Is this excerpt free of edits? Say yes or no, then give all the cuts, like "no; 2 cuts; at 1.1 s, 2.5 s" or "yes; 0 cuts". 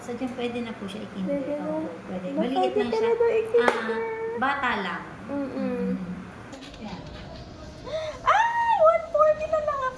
no; 1 cut; at 6.6 s